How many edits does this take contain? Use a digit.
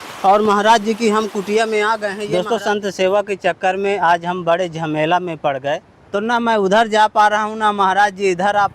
2